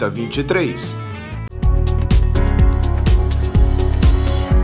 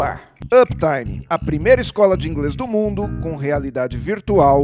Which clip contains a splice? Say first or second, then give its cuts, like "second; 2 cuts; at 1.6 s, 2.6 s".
first; 1 cut; at 1.5 s